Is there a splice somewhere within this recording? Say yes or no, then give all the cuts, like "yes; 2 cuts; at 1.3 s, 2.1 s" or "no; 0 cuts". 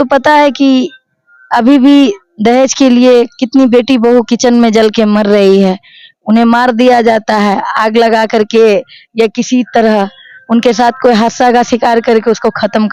no; 0 cuts